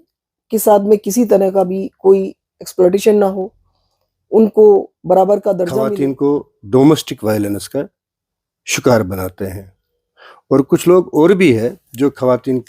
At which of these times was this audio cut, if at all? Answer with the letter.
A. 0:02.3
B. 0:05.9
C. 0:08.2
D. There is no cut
B